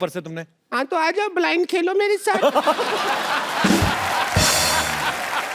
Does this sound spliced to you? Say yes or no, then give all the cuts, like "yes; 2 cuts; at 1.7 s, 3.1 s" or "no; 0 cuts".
no; 0 cuts